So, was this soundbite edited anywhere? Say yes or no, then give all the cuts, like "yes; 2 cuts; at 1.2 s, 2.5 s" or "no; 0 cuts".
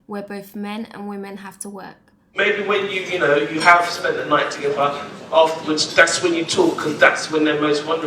yes; 1 cut; at 2.2 s